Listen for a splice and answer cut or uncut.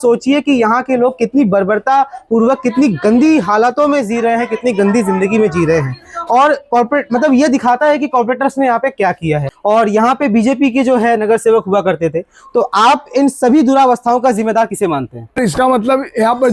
cut